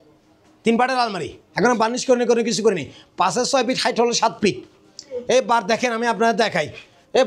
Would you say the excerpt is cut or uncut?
uncut